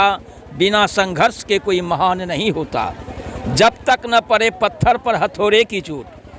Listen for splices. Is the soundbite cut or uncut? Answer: uncut